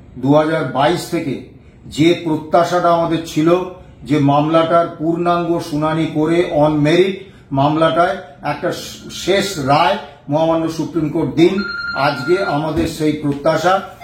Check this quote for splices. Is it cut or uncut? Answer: uncut